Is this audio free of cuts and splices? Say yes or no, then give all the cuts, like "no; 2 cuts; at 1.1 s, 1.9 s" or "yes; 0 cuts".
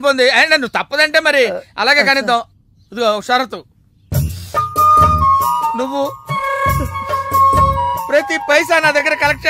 yes; 0 cuts